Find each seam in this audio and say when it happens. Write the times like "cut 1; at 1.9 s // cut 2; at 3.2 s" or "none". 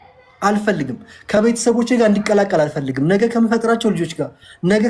cut 1; at 1.4 s